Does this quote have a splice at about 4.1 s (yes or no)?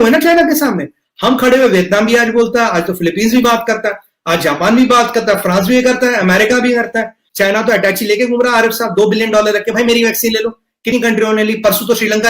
no